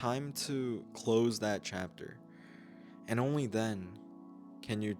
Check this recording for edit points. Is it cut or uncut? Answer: cut